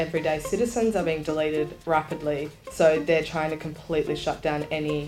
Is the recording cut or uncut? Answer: cut